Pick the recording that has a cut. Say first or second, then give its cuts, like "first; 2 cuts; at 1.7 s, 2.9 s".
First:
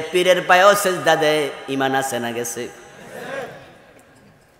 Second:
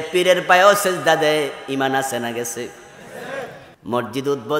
second; 1 cut; at 3.7 s